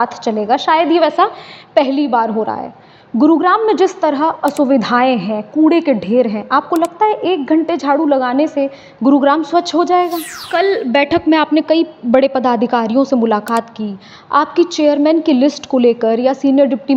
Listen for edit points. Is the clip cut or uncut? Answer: cut